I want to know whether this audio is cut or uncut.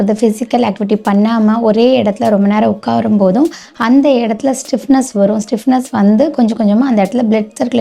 uncut